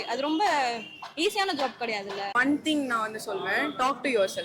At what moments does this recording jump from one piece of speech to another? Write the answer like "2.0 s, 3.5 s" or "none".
2.4 s

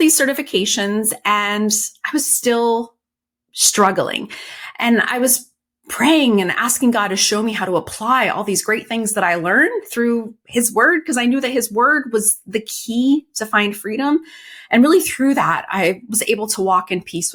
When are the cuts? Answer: none

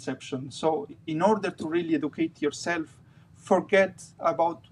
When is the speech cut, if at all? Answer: none

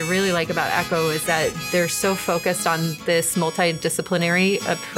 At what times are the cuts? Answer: none

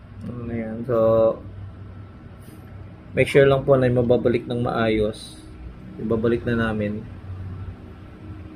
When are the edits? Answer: none

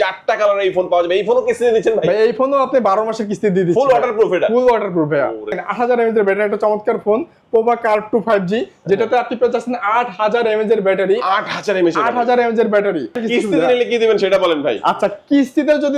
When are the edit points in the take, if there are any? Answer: 5.6 s, 13.2 s

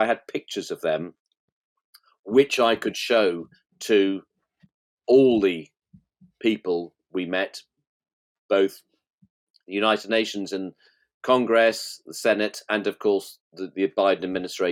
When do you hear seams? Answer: none

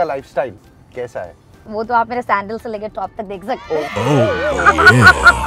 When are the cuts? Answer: none

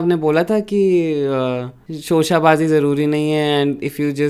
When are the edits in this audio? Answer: none

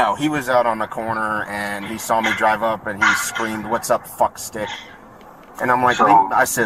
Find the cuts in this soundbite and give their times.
none

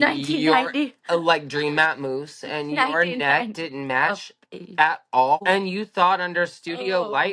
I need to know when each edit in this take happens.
5.4 s

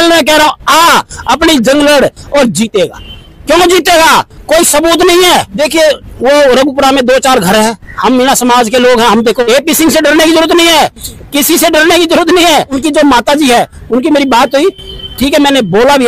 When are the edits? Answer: 5.5 s, 9.4 s, 12.7 s

